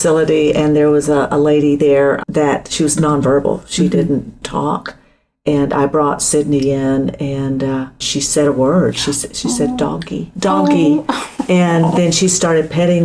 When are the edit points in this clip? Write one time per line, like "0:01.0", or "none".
0:04.5